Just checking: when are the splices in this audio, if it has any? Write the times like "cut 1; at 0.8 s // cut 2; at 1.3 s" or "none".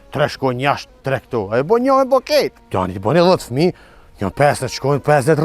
cut 1; at 2.6 s